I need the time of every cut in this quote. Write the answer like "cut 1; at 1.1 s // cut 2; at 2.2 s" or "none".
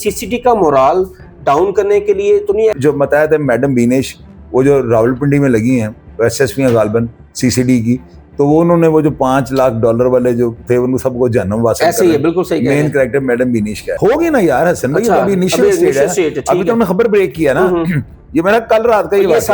cut 1; at 2.8 s // cut 2; at 13.8 s